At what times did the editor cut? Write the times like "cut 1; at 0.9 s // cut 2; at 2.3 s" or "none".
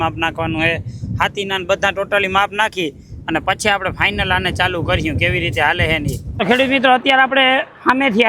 cut 1; at 6.4 s